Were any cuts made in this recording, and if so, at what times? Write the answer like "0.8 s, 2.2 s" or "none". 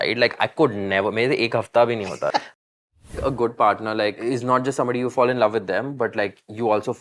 2.5 s, 4.2 s, 5.1 s